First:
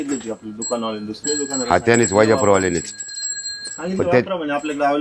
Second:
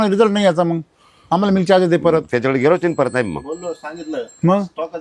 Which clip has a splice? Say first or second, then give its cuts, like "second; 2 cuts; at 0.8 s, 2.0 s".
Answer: first; 2 cuts; at 1.3 s, 3.7 s